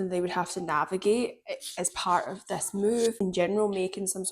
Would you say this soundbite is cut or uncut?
cut